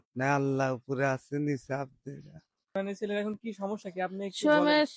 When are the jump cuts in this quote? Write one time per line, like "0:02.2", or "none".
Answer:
0:02.8

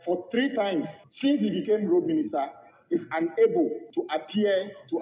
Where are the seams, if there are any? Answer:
0:01.0
0:03.8

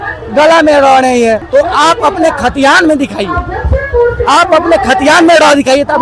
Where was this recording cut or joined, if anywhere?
0:01.4

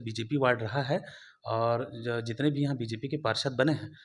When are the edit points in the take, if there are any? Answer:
none

